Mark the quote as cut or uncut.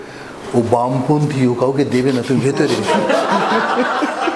uncut